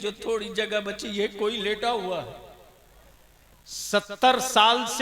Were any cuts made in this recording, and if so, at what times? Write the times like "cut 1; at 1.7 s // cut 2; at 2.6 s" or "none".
cut 1; at 3.5 s